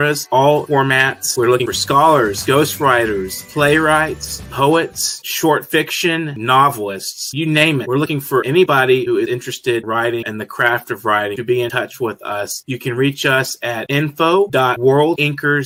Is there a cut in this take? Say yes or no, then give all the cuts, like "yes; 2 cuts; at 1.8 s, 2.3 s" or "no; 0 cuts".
no; 0 cuts